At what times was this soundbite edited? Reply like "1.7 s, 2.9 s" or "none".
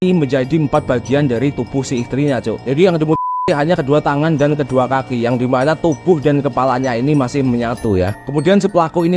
none